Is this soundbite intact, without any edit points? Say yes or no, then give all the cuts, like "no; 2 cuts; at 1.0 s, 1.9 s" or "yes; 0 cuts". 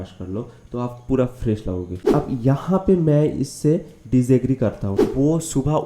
no; 2 cuts; at 2.0 s, 5.0 s